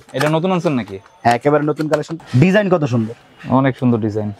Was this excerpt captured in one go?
no; 1 cut; at 2.1 s

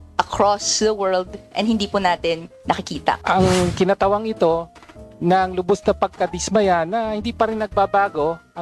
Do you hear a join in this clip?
yes; 1 cut; at 3.2 s

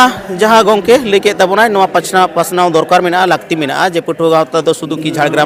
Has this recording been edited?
no; 0 cuts

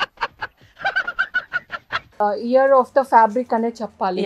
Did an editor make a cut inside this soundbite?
yes; 1 cut; at 2.0 s

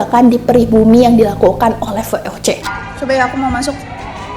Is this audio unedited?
no; 1 cut; at 2.6 s

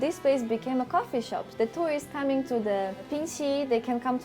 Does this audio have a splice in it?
yes; 1 cut; at 1.4 s

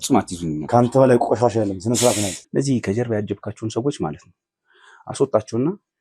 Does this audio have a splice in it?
yes; 1 cut; at 2.4 s

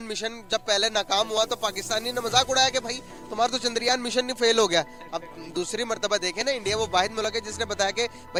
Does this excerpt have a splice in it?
no; 0 cuts

